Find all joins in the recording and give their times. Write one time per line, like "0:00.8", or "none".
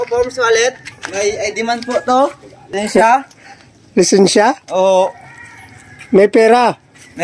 0:00.9
0:02.7